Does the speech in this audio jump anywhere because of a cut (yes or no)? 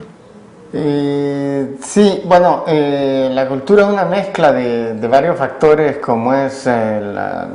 no